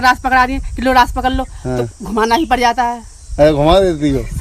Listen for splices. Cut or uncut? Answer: uncut